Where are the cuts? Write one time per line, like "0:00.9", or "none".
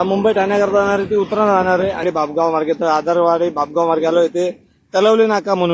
0:02.0